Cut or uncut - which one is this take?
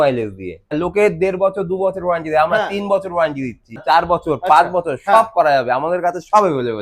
cut